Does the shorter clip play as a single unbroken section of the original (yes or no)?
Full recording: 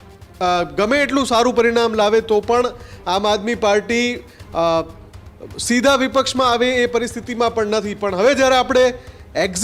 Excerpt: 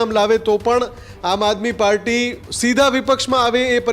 no